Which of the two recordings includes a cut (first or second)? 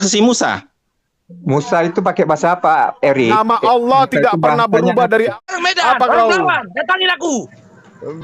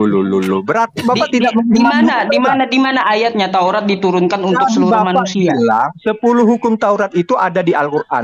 first